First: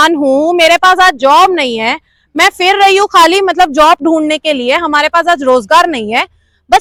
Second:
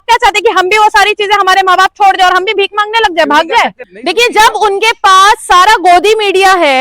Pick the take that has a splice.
second; 1 cut; at 3.9 s

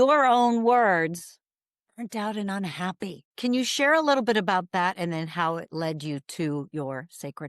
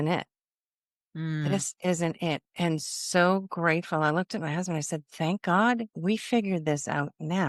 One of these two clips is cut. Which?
first; 1 cut; at 3.2 s

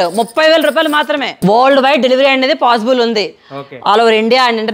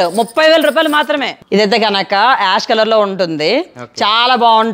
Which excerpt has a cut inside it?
first; 1 cut; at 1.3 s

